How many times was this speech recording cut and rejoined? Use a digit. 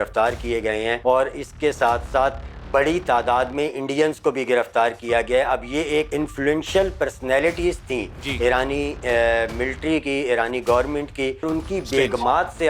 3